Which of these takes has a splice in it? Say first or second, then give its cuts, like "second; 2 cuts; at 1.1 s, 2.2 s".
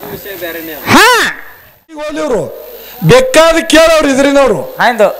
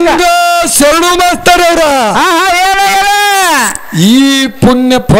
first; 1 cut; at 1.9 s